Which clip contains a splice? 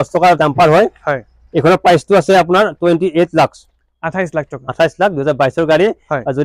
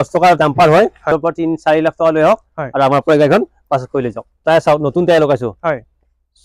second; 2 cuts; at 1.1 s, 4.3 s

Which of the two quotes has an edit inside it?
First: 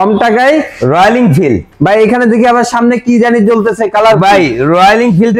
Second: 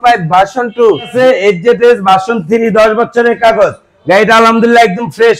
second; 1 cut; at 1.1 s

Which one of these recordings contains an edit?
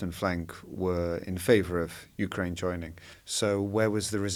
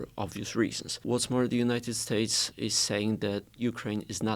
second; 3 cuts; at 1.0 s, 2.5 s, 3.6 s

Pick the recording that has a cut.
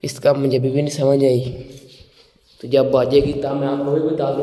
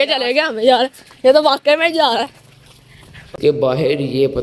second; 1 cut; at 3.3 s

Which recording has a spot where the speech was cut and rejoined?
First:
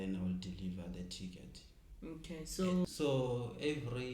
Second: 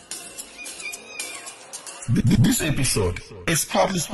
first; 1 cut; at 2.8 s

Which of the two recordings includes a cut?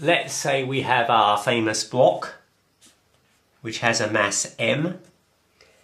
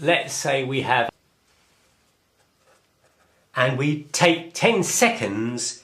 first; 1 cut; at 1.1 s

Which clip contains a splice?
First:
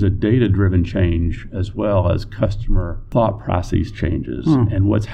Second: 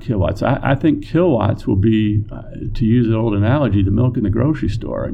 first; 1 cut; at 3.0 s

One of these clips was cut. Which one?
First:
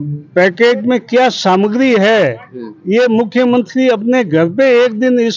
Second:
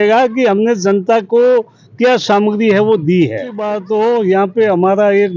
second; 1 cut; at 3.8 s

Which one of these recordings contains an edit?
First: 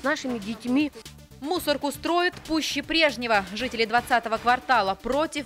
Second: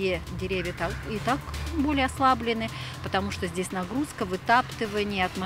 first; 1 cut; at 1.1 s

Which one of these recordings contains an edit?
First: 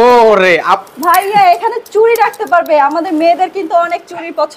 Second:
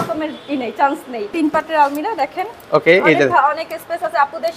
second; 1 cut; at 1.3 s

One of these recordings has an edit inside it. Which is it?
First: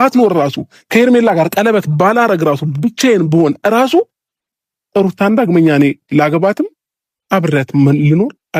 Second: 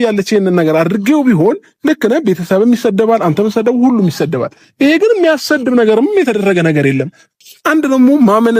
second; 1 cut; at 7.4 s

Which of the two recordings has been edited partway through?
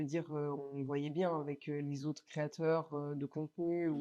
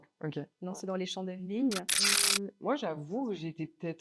second; 1 cut; at 2.2 s

